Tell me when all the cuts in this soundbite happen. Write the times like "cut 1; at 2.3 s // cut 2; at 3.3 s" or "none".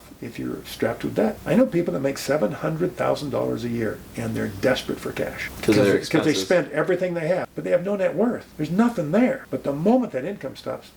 cut 1; at 1.4 s // cut 2; at 5.5 s // cut 3; at 7.5 s // cut 4; at 8.5 s // cut 5; at 9.5 s